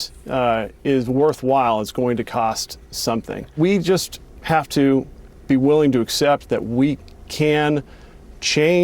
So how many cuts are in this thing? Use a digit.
1